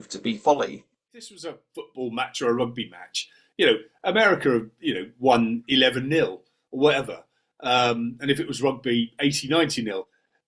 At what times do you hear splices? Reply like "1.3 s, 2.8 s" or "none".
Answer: 1.4 s